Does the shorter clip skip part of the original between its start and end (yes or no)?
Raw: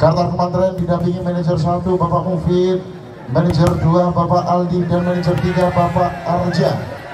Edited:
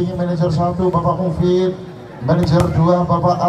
no